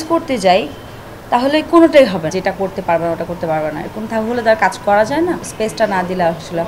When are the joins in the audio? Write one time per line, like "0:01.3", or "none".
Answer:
0:02.3
0:05.5